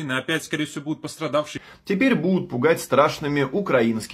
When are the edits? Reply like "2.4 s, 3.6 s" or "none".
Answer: 1.6 s